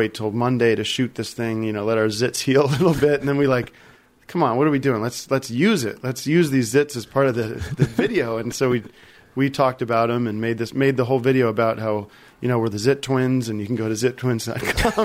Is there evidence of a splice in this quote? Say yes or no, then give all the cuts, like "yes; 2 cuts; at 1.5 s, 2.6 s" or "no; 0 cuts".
no; 0 cuts